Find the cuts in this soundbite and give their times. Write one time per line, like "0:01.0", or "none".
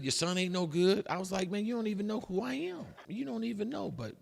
0:02.7